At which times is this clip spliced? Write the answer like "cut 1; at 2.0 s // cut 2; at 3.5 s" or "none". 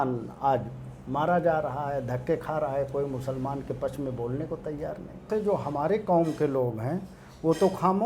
cut 1; at 5.2 s